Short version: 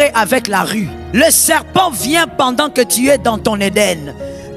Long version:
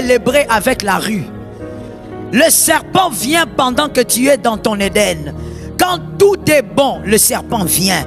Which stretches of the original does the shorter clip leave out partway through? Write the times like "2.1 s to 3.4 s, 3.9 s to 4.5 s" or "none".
1.3 s to 2.2 s